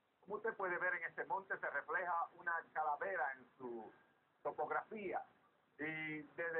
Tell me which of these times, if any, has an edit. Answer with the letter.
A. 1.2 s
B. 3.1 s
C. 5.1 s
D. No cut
A